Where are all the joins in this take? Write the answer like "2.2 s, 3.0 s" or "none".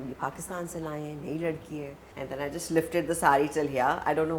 2.0 s